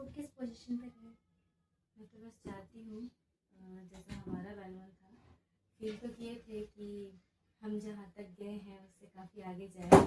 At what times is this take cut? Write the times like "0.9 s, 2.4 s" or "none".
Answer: none

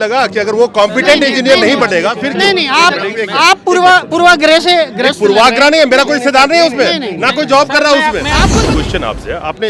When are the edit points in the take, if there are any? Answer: 8.5 s

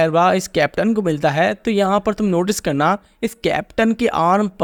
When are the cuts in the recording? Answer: none

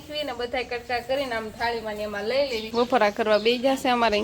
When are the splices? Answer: 2.7 s

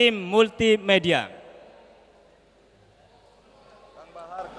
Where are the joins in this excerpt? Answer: none

